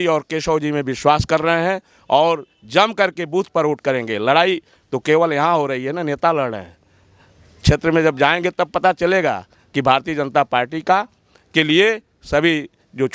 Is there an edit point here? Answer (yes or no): no